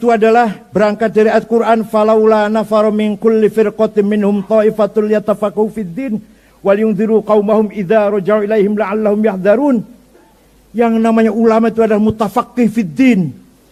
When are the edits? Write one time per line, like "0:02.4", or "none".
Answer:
none